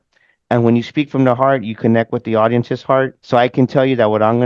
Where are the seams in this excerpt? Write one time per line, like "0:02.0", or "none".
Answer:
0:03.2